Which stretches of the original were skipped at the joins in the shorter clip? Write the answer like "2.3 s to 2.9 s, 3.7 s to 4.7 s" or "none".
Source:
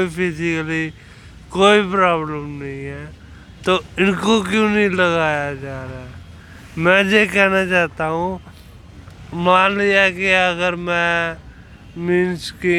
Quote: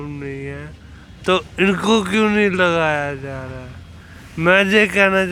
none